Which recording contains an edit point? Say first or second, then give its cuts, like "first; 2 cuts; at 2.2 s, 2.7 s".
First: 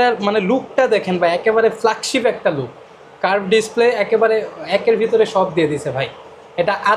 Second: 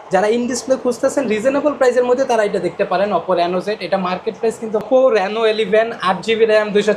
second; 1 cut; at 4.8 s